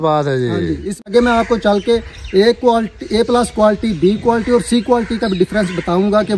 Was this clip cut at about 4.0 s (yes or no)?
no